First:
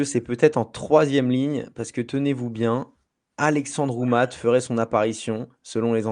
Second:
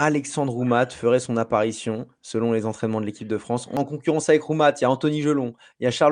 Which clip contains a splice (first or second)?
second